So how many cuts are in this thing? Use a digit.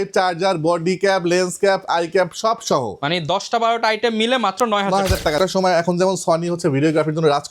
1